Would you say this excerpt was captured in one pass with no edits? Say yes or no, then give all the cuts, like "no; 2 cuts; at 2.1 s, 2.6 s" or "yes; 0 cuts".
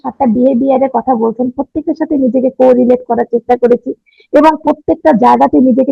yes; 0 cuts